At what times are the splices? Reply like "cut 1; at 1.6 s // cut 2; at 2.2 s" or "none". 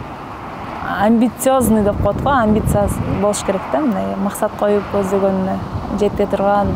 none